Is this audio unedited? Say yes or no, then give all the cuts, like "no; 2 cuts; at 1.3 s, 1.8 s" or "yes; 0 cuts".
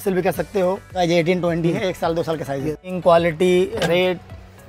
no; 2 cuts; at 1.0 s, 2.9 s